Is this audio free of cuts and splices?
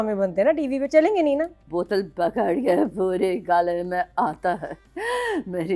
no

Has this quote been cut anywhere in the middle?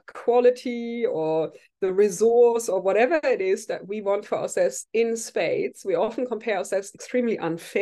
no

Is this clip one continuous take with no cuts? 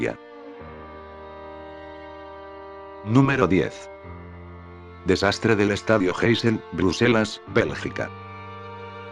yes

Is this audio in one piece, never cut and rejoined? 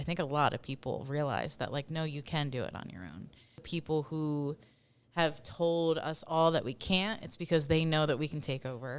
no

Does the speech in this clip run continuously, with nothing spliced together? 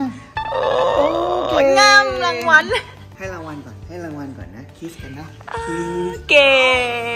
no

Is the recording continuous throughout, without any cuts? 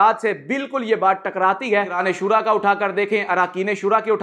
no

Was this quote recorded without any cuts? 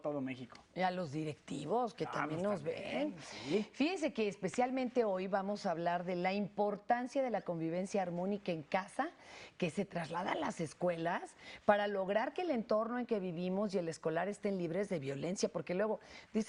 no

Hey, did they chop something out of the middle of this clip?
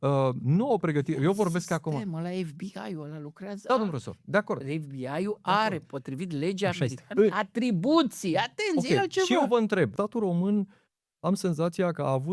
yes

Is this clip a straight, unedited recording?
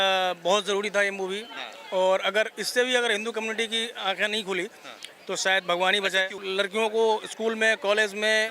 no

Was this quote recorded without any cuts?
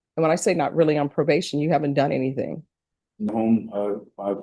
no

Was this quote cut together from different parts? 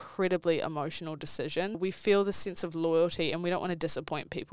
yes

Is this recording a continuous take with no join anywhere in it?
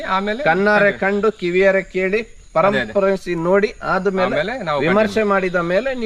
yes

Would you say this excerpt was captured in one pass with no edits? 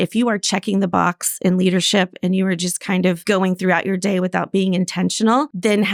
yes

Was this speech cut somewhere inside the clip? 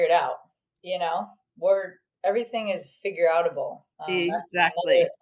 no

